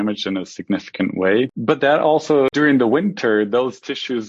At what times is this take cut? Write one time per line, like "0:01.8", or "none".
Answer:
0:01.6
0:02.5

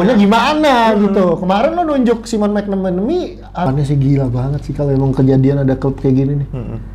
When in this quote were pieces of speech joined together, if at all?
0:03.7

